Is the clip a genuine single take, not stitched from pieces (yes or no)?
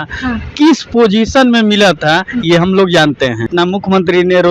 no